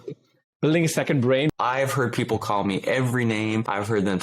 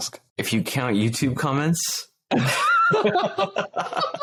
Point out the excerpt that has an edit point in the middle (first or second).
first